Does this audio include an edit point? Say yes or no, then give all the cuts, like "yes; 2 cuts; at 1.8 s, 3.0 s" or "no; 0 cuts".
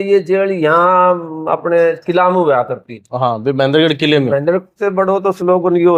yes; 1 cut; at 4.8 s